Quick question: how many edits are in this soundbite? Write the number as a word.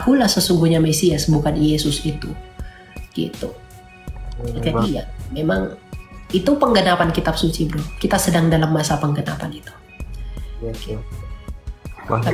zero